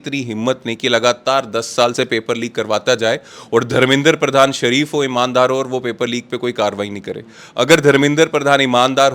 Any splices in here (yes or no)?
no